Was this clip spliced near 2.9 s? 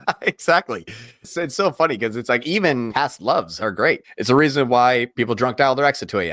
yes; 4 cuts; at 1.3 s, 2.9 s, 4.1 s, 5.1 s

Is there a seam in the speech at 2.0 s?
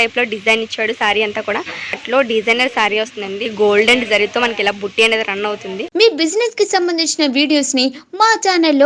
yes; 3 cuts; at 2.0 s, 3.5 s, 5.9 s

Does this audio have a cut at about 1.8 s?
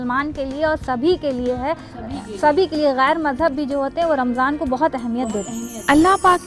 no; 1 cut; at 5.2 s

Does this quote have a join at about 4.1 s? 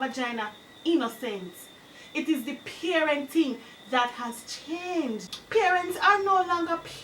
no; 1 cut; at 5.3 s

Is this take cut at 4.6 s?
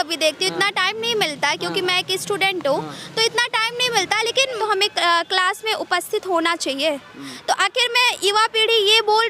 yes; 1 cut; at 4.6 s

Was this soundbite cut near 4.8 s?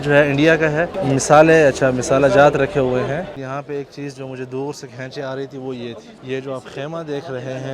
no; 2 cuts; at 3.3 s, 6.1 s

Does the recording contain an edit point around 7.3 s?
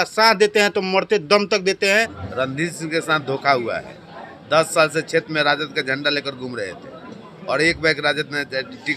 no; 1 cut; at 2.2 s

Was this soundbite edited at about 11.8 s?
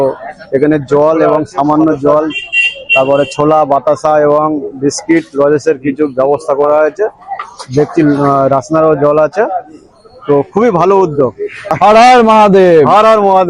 yes; 1 cut; at 11.8 s

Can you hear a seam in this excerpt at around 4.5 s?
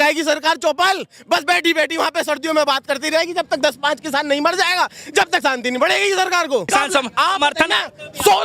no; 1 cut; at 6.7 s

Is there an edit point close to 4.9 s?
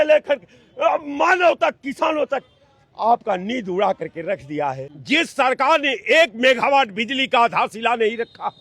yes; 1 cut; at 4.9 s

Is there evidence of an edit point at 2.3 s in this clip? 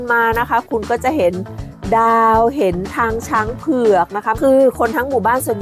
no; 1 cut; at 4.4 s

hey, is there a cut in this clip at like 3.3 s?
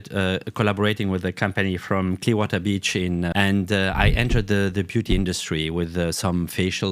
yes; 1 cut; at 3.3 s

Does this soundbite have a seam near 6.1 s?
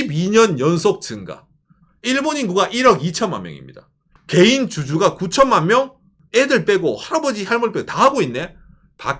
yes; 2 cuts; at 4.0 s, 6.1 s

